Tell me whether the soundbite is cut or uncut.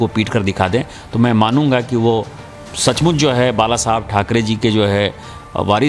uncut